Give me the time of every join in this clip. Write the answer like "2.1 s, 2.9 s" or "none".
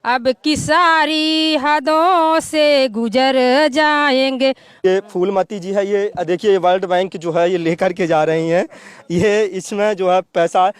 4.7 s